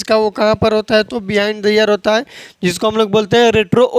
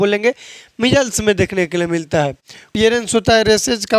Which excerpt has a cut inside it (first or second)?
second